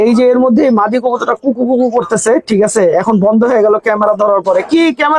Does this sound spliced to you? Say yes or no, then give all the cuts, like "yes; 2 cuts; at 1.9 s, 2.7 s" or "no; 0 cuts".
no; 0 cuts